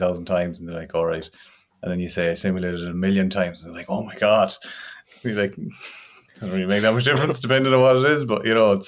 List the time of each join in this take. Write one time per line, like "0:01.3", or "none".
none